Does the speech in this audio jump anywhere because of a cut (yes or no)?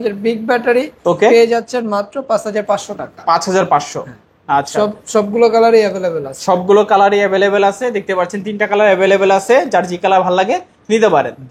no